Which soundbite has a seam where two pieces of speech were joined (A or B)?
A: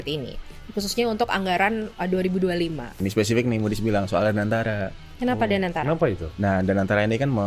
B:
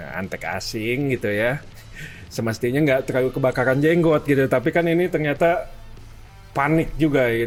A